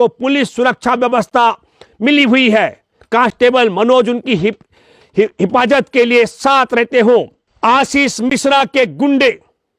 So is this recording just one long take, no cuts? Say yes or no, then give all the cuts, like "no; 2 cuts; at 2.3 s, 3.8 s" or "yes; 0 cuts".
no; 1 cut; at 7.4 s